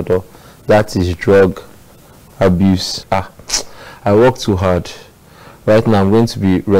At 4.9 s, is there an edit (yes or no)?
no